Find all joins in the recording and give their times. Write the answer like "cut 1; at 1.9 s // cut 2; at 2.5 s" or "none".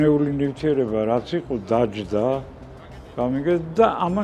none